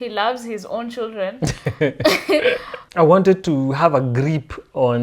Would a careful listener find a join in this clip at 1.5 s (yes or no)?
no